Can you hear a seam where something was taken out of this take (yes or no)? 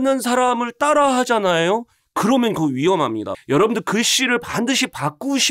yes